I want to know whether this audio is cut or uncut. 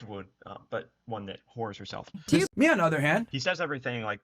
cut